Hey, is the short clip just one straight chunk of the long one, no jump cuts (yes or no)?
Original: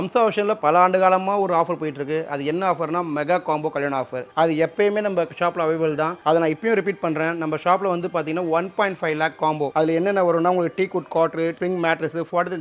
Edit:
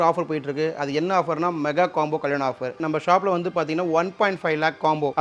no